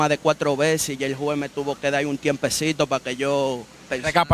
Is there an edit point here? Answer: no; 0 cuts

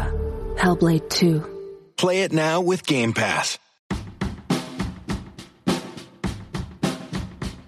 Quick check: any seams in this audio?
yes; 1 cut; at 3.7 s

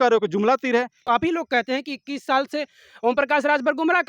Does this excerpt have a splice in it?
yes; 1 cut; at 1.0 s

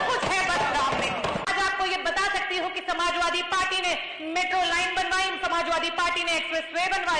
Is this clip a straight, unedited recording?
no; 1 cut; at 1.5 s

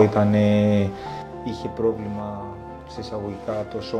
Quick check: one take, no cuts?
yes; 0 cuts

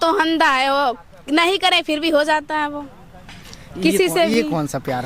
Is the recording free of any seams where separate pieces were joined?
yes; 0 cuts

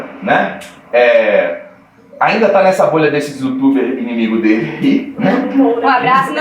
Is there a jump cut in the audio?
no; 0 cuts

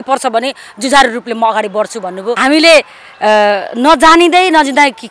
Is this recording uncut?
no; 1 cut; at 2.3 s

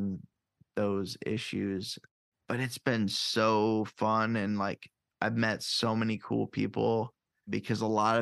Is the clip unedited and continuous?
no; 1 cut; at 2.1 s

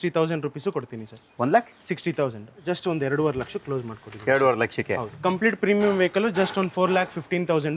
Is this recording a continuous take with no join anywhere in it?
no; 2 cuts; at 2.6 s, 5.1 s

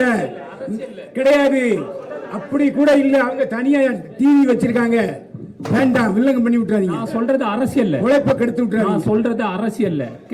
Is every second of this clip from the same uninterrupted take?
yes; 0 cuts

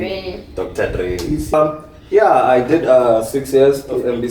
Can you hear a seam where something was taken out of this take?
yes; 1 cut; at 1.5 s

